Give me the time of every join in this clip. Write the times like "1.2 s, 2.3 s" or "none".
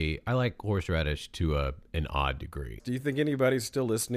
2.8 s